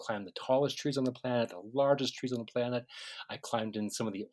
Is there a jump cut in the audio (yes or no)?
no